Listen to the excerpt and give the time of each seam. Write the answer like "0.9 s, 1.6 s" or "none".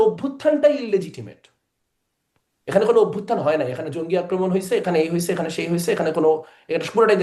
none

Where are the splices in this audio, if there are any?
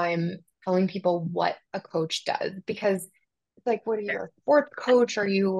none

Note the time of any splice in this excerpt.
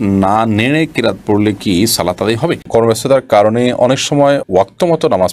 2.6 s

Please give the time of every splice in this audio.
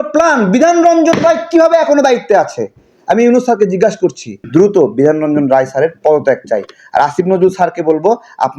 4.4 s

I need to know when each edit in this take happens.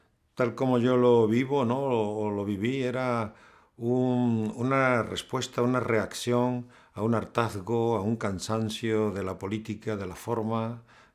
9.4 s

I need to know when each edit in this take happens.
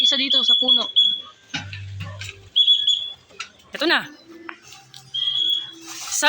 3.8 s

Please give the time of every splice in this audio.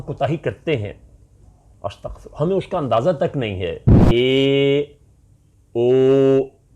3.9 s

